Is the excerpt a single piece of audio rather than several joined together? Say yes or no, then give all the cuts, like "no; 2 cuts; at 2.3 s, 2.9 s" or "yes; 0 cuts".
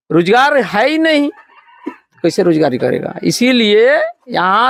yes; 0 cuts